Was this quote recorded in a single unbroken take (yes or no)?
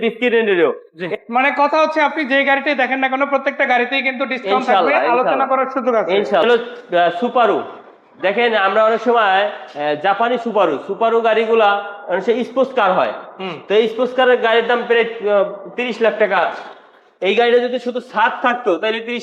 no